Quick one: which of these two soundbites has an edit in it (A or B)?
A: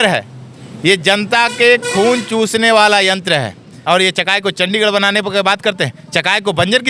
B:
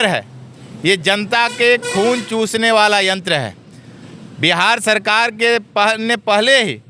A